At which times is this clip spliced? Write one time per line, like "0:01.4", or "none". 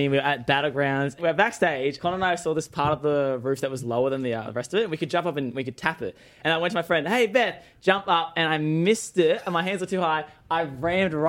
0:01.2
0:02.0
0:06.4

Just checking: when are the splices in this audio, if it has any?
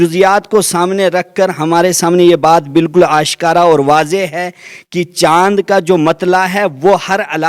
none

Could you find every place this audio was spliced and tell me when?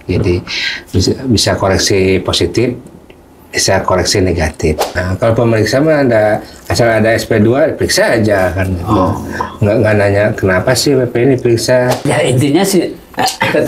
0:04.9
0:12.0

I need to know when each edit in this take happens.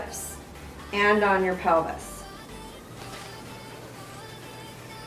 0:02.9

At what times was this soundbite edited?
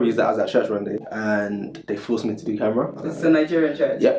0:03.0

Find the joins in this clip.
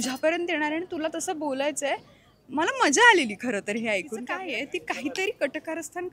0:04.3

